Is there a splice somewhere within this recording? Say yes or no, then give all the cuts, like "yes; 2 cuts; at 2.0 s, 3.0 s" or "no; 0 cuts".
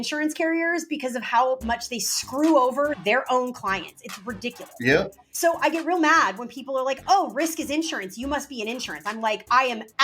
yes; 1 cut; at 5.2 s